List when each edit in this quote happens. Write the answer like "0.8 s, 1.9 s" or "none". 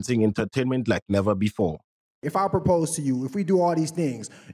2.2 s